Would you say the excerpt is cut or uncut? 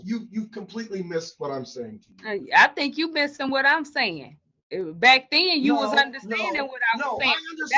uncut